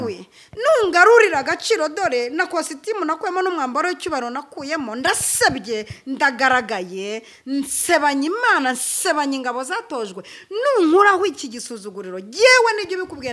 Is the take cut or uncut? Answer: uncut